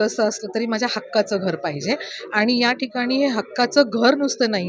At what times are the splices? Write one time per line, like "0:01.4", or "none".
none